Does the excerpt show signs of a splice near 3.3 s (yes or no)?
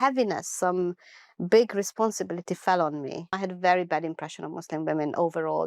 yes